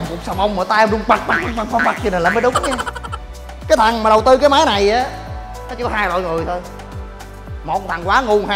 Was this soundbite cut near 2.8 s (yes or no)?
yes